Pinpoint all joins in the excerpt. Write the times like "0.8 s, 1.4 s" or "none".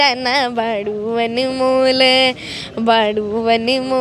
none